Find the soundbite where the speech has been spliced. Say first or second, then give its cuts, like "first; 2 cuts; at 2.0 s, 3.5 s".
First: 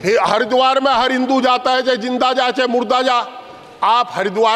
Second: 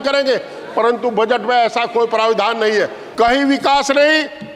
second; 1 cut; at 3.0 s